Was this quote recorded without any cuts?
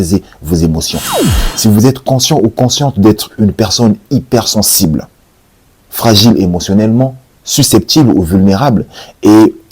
no; 1 cut; at 1.1 s

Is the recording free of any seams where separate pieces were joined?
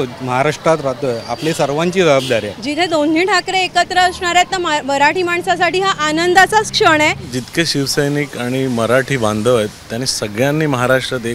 no; 2 cuts; at 2.6 s, 7.4 s

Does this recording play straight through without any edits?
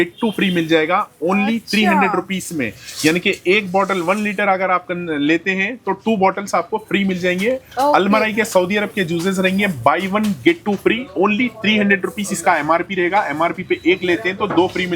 yes; 0 cuts

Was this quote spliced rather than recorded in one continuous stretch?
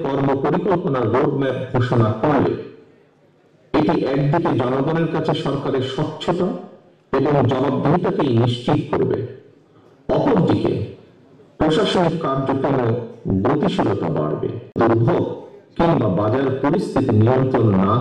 yes; 1 cut; at 14.6 s

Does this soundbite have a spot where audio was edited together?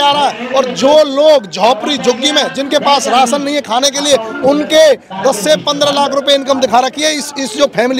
no; 0 cuts

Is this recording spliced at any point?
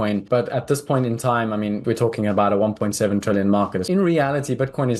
yes; 1 cut; at 3.8 s

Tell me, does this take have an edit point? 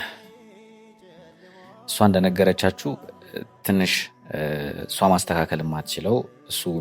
no; 0 cuts

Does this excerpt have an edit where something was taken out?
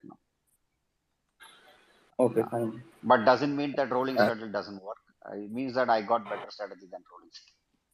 no; 0 cuts

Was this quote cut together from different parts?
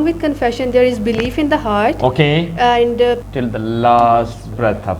yes; 1 cut; at 3.2 s

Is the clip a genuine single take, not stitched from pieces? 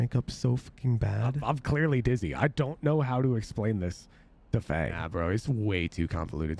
no; 2 cuts; at 1.4 s, 5.0 s

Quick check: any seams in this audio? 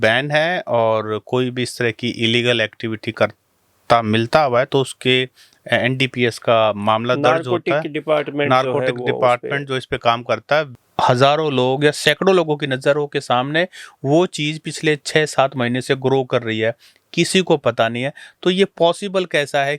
yes; 1 cut; at 10.7 s

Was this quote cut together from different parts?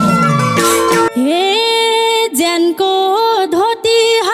yes; 1 cut; at 1.1 s

